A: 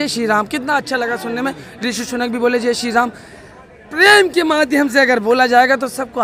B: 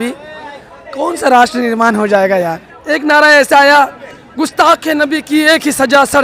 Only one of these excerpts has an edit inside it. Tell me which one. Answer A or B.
B